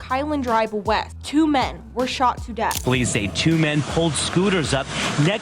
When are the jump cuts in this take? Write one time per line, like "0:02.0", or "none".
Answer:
0:01.1
0:02.8